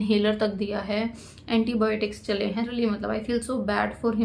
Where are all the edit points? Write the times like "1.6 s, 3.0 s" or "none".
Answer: 2.7 s